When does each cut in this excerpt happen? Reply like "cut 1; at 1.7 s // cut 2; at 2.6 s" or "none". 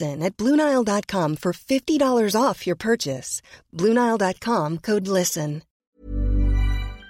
cut 1; at 5.8 s